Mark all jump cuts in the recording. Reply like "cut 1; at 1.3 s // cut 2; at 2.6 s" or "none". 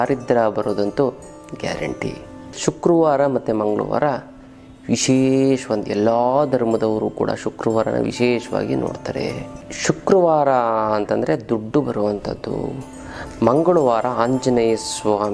cut 1; at 2.5 s // cut 2; at 9.7 s